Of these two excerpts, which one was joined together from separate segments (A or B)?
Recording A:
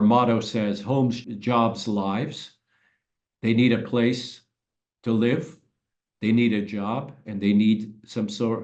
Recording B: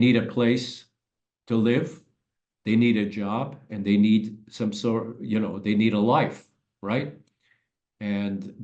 A